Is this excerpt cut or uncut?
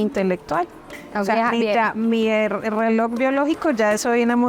cut